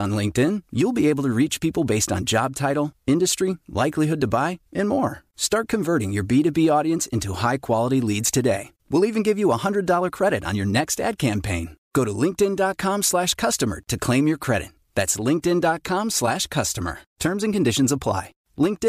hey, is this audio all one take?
yes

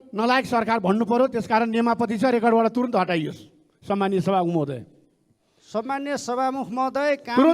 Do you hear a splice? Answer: no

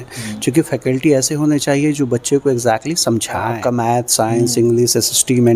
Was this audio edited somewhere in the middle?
yes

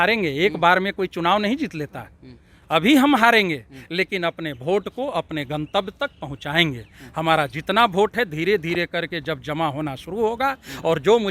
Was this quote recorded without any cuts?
yes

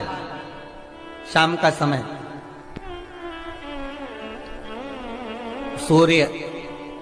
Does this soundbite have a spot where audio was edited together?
no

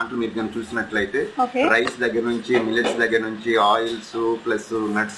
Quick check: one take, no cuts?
yes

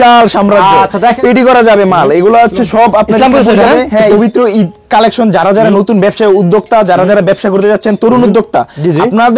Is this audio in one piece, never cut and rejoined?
no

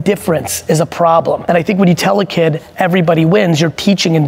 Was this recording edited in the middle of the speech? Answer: yes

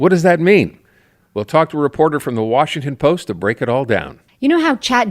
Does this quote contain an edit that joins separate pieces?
yes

